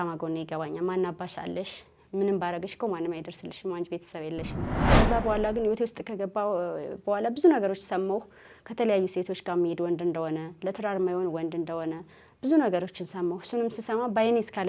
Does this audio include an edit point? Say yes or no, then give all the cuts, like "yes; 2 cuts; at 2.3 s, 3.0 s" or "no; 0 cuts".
yes; 1 cut; at 4.8 s